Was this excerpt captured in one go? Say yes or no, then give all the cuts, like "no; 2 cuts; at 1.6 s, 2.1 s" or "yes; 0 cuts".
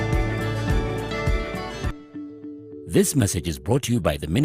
no; 1 cut; at 2.9 s